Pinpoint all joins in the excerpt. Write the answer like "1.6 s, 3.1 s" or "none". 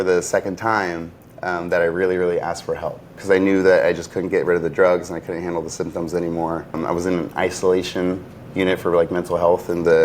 3.2 s, 6.8 s